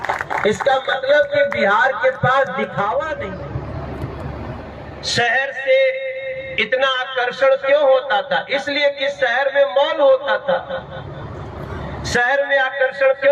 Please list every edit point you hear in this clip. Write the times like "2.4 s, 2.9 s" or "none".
3.3 s